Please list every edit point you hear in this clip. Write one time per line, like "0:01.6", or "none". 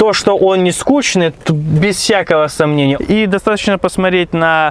0:03.0

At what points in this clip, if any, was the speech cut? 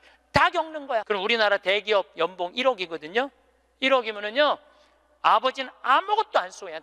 0:01.0

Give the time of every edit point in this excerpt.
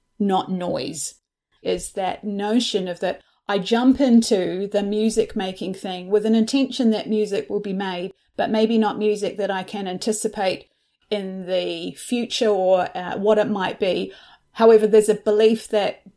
0:01.6

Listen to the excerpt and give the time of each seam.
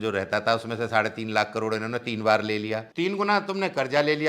0:02.9

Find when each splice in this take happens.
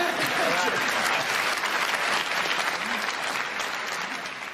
none

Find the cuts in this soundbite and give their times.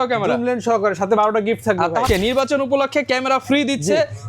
0:02.1

